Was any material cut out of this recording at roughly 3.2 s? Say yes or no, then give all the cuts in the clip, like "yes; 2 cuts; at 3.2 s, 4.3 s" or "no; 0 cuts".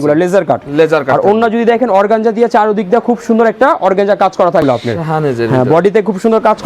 no; 1 cut; at 4.6 s